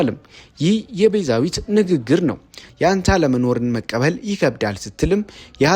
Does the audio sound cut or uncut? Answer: cut